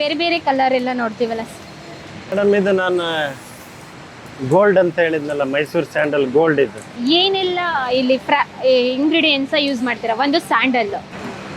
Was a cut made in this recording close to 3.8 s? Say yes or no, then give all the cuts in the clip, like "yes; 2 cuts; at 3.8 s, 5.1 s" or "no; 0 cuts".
no; 1 cut; at 6.9 s